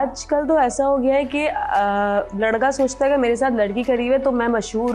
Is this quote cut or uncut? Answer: uncut